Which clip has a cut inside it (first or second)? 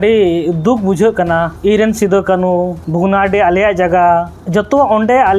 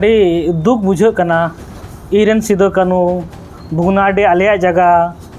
first